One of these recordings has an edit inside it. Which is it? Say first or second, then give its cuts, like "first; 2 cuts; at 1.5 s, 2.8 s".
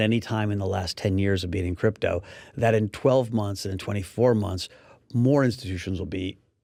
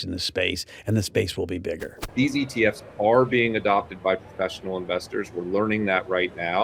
second; 1 cut; at 2.0 s